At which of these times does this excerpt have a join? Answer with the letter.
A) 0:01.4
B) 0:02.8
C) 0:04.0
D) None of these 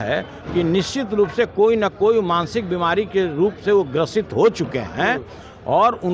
B